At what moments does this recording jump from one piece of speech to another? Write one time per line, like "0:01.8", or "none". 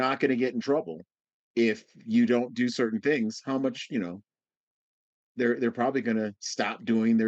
none